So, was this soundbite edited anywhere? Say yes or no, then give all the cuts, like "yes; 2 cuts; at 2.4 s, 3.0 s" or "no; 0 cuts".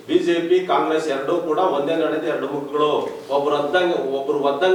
no; 0 cuts